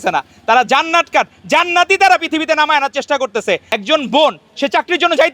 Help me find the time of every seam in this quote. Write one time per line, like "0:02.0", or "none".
0:03.7